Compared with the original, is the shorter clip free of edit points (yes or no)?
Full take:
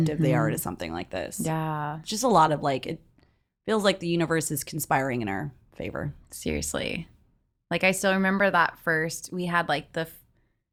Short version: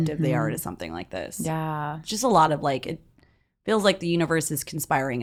yes